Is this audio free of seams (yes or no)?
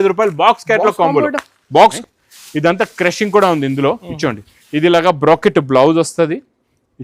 no